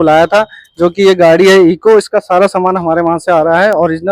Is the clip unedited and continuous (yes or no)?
yes